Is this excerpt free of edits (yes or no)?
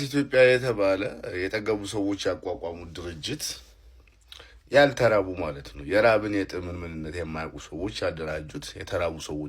yes